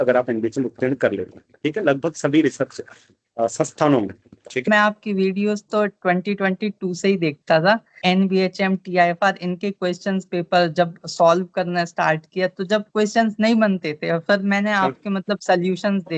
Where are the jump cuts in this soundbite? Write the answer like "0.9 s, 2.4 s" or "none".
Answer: 4.7 s, 7.9 s

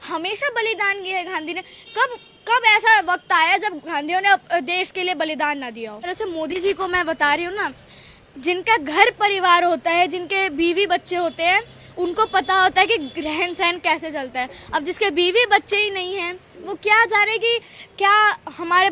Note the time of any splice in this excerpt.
6.1 s

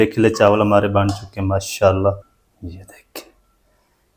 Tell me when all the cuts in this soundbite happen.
2.4 s

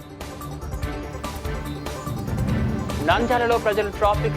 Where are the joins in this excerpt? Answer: 3.0 s

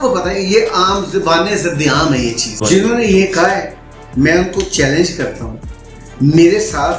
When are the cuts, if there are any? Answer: 2.6 s

